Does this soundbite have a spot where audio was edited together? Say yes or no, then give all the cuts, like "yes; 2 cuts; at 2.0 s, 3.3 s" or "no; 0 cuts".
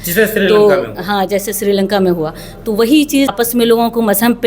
yes; 1 cut; at 3.3 s